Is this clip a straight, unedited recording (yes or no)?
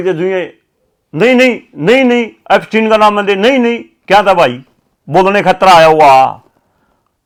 yes